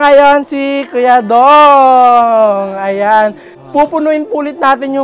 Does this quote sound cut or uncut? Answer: cut